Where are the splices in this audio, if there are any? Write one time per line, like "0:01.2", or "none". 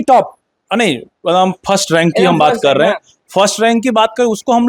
none

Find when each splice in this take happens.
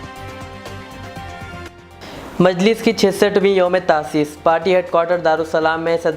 0:01.6

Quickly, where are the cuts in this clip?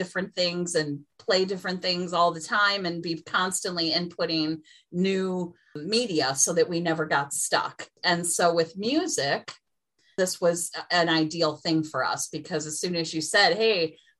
0:05.8
0:07.9
0:10.2

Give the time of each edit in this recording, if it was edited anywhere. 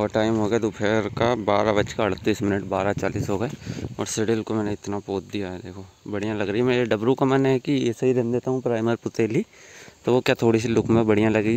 none

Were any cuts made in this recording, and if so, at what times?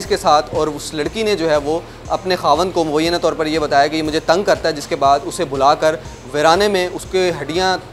none

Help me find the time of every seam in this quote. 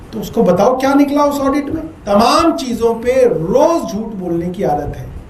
0:02.1

